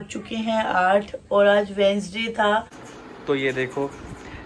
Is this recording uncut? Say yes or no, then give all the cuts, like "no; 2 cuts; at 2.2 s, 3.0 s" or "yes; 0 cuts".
no; 1 cut; at 2.8 s